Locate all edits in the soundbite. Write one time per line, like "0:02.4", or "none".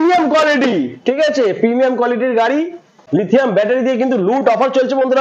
0:02.9